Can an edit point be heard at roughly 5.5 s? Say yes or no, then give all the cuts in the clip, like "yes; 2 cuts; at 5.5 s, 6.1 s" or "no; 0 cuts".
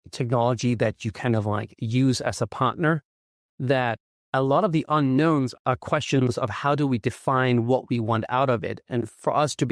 yes; 1 cut; at 5.5 s